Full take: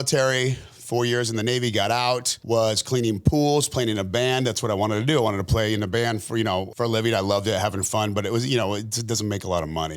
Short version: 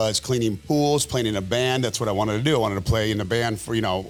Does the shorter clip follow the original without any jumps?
yes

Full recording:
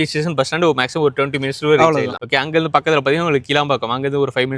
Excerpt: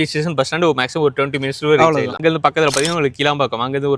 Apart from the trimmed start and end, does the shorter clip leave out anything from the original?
yes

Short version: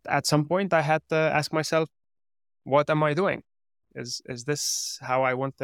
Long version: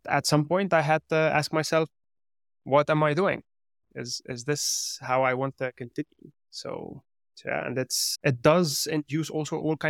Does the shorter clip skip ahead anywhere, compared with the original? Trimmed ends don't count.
no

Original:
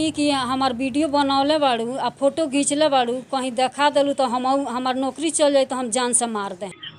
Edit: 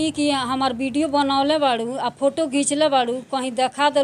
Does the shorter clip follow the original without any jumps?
yes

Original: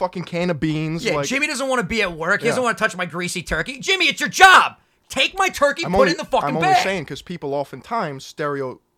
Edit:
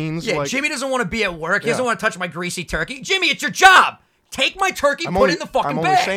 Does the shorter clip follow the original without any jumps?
yes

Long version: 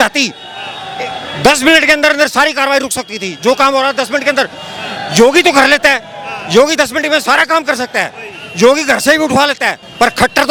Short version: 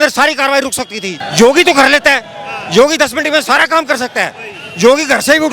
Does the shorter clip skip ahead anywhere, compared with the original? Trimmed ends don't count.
yes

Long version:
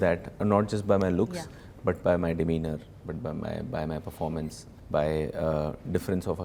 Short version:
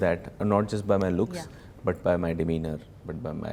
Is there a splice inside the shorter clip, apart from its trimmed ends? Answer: no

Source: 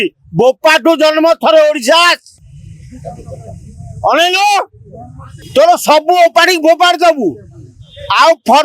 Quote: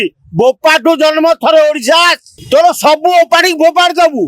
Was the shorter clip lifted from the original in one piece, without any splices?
no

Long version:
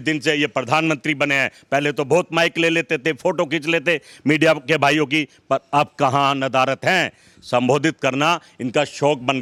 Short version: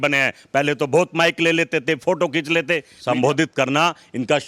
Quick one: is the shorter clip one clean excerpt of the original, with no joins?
no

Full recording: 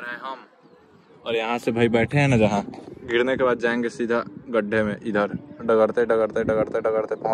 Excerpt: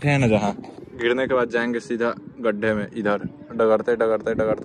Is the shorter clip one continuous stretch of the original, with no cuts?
yes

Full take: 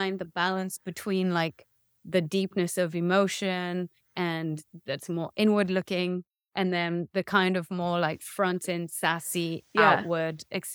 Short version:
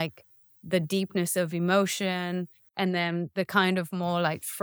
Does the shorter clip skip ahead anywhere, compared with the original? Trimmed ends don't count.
yes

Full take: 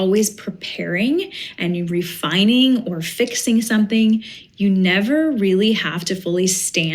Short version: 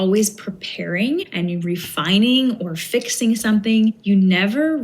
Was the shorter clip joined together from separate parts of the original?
yes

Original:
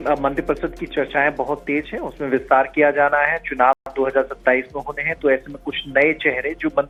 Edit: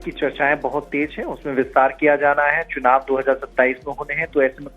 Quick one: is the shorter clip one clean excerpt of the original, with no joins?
no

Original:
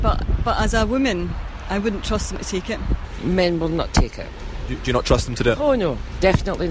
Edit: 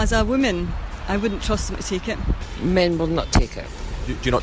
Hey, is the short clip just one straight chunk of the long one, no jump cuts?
yes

